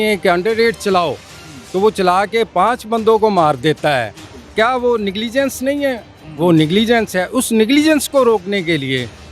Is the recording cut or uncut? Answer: uncut